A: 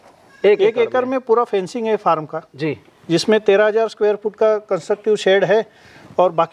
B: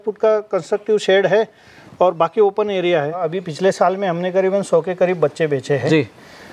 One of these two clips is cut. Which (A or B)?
B